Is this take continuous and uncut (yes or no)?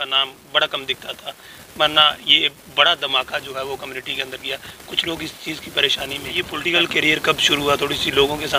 no